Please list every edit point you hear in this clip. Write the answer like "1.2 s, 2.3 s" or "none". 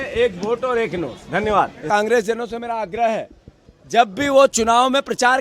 1.8 s